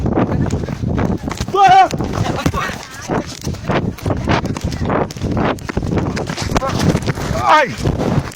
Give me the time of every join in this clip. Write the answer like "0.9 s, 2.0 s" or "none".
none